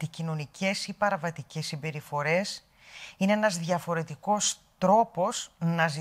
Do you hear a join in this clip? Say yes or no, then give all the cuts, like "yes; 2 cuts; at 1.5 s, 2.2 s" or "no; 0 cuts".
no; 0 cuts